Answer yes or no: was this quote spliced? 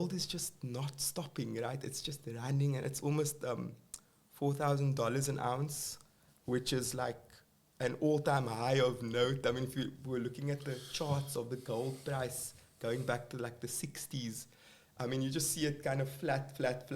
no